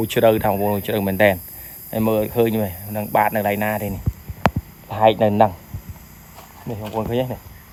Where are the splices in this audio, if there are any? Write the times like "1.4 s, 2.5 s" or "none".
none

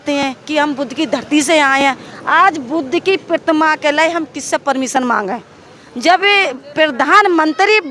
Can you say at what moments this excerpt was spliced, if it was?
none

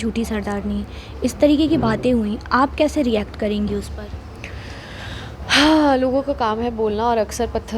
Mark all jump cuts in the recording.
none

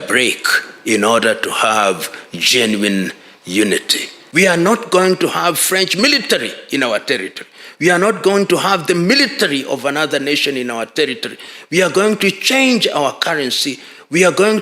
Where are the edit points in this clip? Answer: 4.2 s

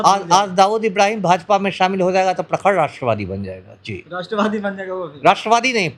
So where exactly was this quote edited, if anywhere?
none

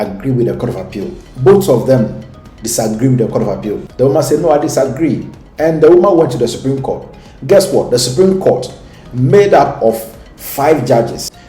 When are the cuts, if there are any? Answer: 3.8 s

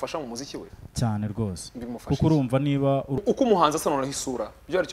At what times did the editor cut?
3.2 s

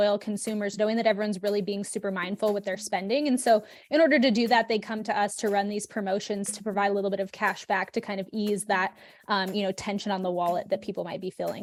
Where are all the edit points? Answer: none

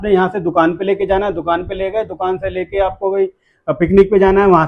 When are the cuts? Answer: none

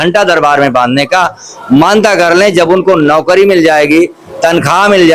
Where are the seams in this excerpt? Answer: none

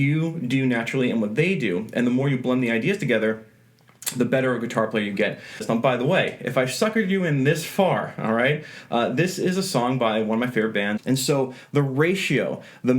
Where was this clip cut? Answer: 5.6 s, 11.0 s

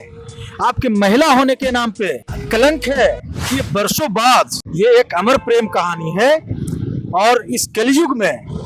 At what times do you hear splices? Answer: 2.3 s, 3.4 s, 4.6 s

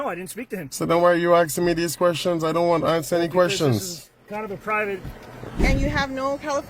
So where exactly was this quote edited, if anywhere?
5.7 s

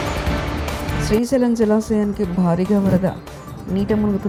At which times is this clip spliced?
none

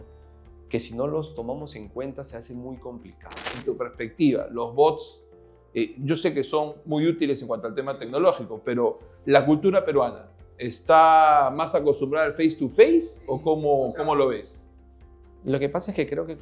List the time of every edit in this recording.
3.4 s

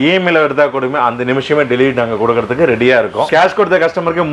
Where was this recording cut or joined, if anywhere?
3.3 s

